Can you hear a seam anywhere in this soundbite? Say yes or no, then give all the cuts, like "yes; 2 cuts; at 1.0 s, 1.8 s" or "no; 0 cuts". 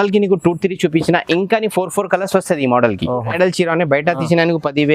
yes; 1 cut; at 3.3 s